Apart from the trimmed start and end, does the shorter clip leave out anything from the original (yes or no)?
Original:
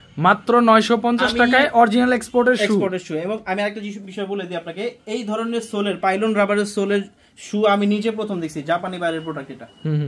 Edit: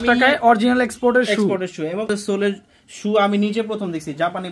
yes